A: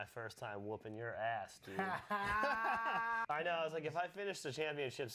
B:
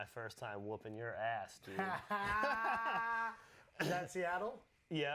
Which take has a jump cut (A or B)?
A